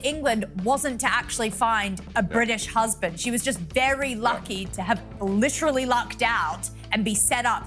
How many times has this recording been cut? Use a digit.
0